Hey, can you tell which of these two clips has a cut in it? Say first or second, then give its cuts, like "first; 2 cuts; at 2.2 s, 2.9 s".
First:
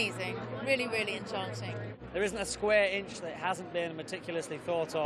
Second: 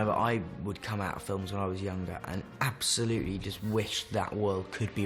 first; 1 cut; at 2.0 s